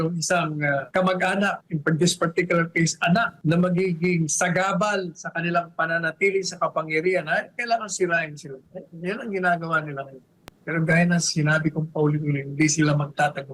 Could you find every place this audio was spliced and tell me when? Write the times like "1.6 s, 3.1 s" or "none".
0.9 s, 1.7 s, 3.3 s